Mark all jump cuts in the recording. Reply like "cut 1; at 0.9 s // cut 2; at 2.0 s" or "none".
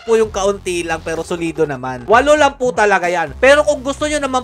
cut 1; at 2.0 s